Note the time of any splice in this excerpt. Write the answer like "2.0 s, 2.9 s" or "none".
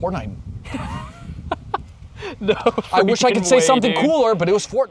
none